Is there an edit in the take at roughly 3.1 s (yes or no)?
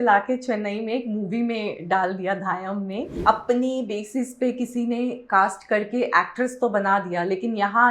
yes